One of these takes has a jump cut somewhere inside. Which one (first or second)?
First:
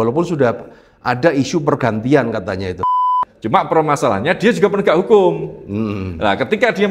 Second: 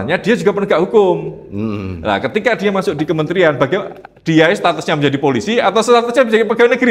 first